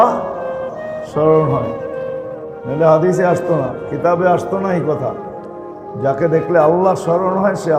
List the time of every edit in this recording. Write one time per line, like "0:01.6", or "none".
none